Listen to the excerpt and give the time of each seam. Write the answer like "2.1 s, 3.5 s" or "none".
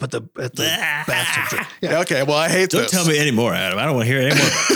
1.9 s